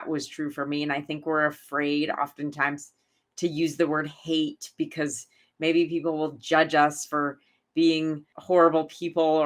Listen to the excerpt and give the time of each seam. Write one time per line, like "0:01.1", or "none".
0:08.3